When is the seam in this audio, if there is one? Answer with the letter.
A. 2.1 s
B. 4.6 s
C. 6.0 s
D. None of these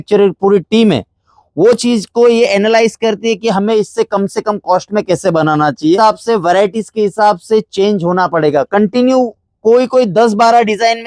C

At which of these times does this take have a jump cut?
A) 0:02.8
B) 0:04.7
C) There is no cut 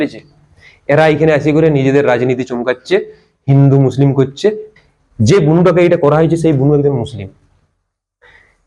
B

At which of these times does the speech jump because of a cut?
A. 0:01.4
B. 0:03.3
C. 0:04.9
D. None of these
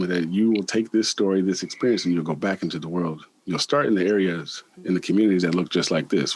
D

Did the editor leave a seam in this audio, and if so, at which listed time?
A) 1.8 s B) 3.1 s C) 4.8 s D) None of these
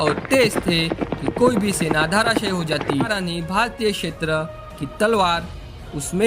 B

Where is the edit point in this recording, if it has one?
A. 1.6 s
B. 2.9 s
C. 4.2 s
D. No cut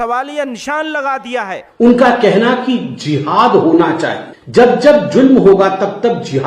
A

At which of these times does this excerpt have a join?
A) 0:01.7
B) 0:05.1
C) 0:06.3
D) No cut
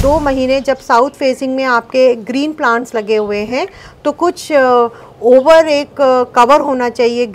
D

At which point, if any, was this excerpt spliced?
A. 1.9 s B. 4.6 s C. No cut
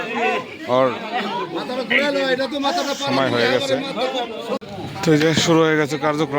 B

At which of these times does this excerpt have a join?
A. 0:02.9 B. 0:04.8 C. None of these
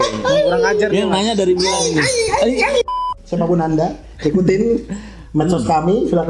A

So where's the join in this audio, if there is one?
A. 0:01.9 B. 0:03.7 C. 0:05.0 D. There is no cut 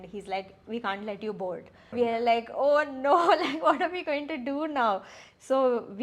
A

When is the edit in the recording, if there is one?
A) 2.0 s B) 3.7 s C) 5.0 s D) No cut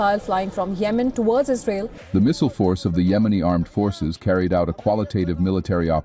A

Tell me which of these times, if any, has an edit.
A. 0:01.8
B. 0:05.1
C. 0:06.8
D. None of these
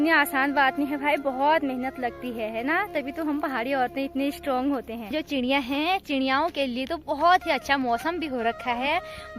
B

